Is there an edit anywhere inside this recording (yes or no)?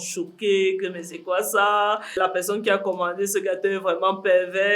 yes